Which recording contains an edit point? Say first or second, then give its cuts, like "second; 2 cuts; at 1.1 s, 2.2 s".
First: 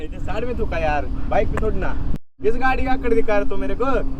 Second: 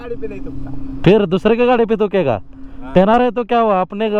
first; 1 cut; at 2.0 s